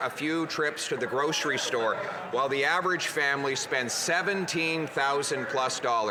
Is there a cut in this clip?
no; 0 cuts

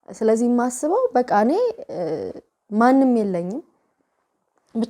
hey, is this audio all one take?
yes; 0 cuts

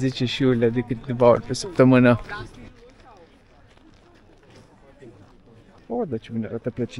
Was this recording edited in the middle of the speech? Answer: no; 0 cuts

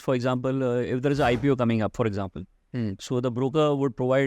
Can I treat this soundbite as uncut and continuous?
yes; 0 cuts

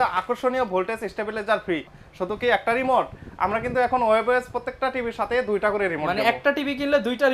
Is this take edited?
yes; 1 cut; at 2.0 s

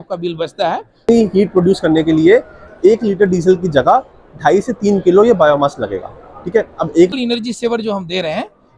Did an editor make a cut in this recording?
yes; 2 cuts; at 1.1 s, 7.1 s

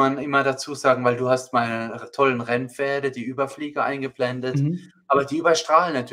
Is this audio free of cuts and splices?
yes; 0 cuts

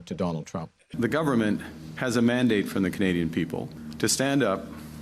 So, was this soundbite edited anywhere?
yes; 2 cuts; at 0.9 s, 3.8 s

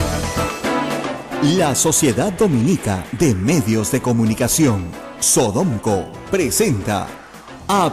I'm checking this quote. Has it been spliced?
yes; 1 cut; at 1.3 s

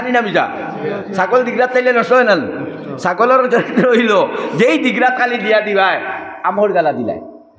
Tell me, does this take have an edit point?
no; 0 cuts

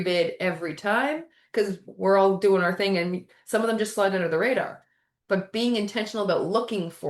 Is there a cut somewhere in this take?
yes; 1 cut; at 1.9 s

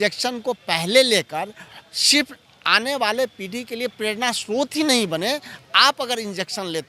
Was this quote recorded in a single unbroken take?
yes; 0 cuts

